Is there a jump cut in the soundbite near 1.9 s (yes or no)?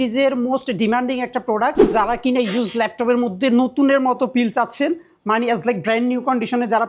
yes